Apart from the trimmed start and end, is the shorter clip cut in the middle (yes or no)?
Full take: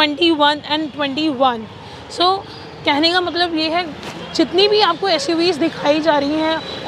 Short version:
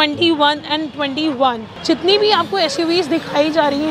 yes